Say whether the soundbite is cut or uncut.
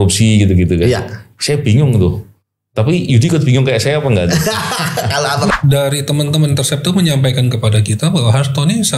cut